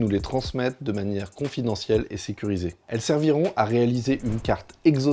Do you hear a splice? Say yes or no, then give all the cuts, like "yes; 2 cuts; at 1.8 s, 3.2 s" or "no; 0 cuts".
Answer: yes; 1 cut; at 2.8 s